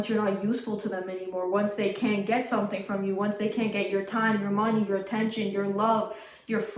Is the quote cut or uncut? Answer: uncut